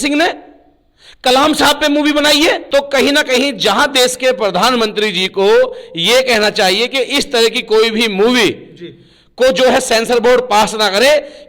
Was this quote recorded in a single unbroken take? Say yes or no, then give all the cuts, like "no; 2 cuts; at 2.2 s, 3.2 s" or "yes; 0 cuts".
no; 1 cut; at 2.6 s